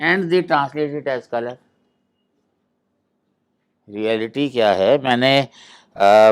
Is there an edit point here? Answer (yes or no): no